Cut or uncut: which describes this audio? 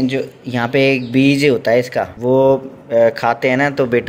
cut